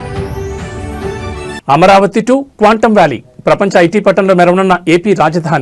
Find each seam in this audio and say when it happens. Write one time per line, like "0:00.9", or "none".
0:01.0